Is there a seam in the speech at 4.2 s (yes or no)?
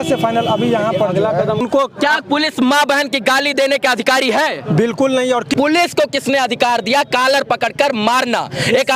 no